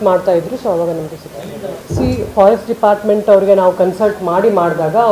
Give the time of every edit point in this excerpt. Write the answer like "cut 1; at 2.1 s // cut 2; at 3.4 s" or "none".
cut 1; at 1.8 s